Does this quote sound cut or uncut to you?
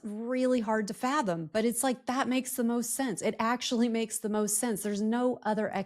uncut